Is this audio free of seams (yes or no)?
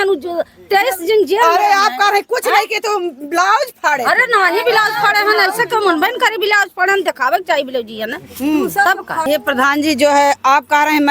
no